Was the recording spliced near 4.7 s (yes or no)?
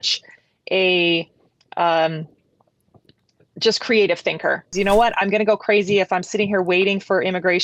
yes